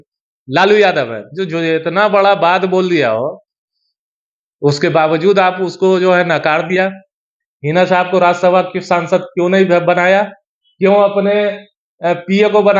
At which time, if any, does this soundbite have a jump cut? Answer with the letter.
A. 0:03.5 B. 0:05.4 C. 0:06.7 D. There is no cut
D